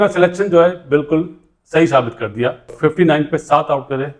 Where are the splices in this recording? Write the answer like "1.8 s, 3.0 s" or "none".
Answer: 2.6 s